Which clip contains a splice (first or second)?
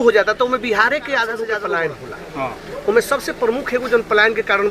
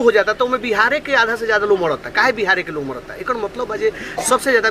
first